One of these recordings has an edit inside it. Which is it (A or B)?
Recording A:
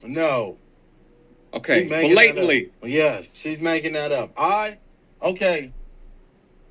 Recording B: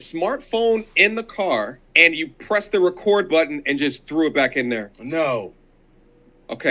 A